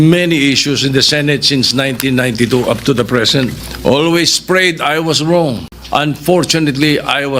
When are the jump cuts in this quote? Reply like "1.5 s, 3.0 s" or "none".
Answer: 3.7 s, 5.7 s